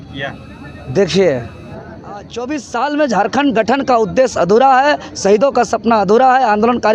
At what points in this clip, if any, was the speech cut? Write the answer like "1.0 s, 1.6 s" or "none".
2.3 s